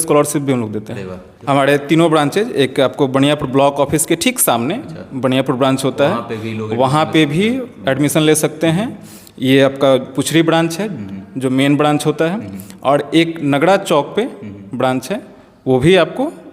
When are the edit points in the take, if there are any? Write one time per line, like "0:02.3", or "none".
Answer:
0:01.3